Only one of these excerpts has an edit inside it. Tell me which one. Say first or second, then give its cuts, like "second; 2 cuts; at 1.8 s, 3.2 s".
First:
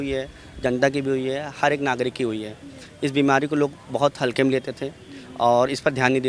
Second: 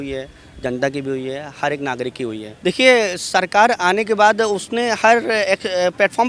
second; 1 cut; at 2.4 s